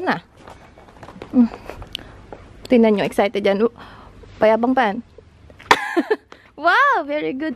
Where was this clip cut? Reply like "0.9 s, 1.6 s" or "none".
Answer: none